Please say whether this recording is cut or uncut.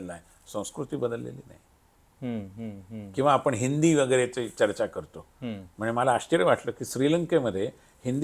uncut